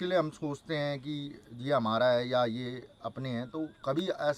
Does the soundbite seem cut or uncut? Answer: uncut